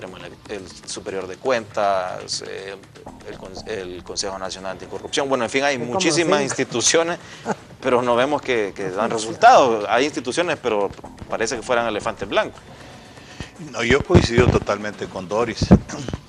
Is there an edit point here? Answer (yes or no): no